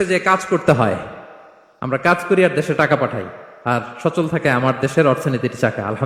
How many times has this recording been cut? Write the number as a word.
zero